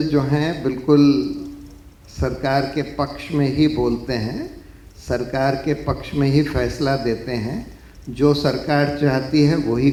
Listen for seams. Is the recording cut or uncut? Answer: uncut